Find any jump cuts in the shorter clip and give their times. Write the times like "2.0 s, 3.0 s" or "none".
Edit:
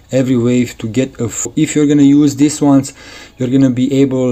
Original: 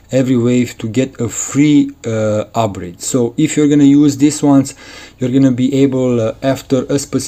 1.5 s